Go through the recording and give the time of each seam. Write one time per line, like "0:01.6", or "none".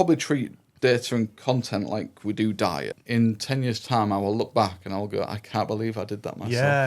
0:03.0